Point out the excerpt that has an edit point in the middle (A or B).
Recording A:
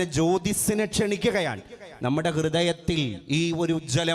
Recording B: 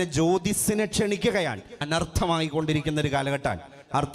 B